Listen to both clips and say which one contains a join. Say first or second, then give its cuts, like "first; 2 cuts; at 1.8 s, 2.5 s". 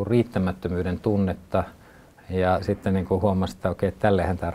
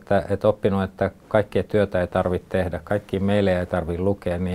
first; 1 cut; at 2.6 s